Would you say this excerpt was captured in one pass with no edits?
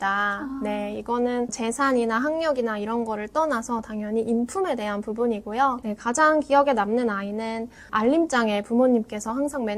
yes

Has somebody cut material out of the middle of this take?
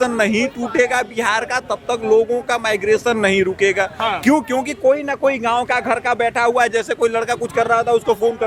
no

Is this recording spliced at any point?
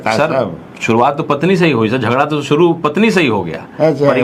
no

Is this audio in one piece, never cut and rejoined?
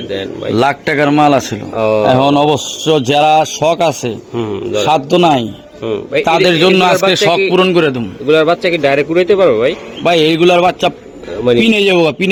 yes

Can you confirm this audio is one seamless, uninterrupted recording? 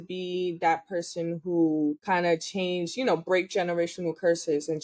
no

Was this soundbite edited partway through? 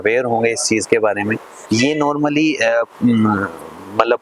yes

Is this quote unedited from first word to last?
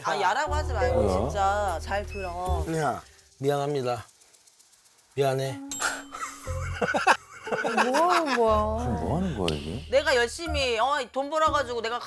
yes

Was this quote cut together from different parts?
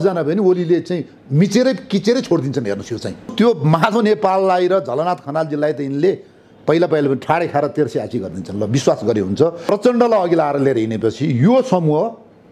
yes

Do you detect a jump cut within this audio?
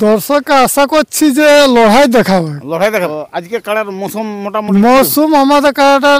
yes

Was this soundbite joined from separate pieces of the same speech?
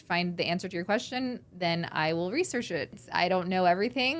yes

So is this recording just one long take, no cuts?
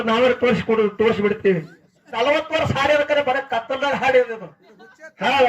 no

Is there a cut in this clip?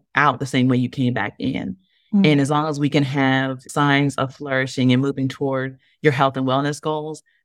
yes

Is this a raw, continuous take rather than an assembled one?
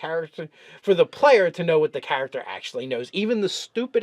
yes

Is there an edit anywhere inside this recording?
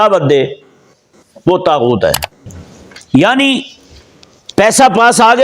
yes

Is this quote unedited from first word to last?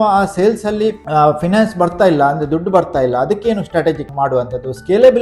no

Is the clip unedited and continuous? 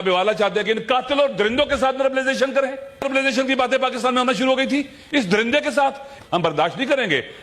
no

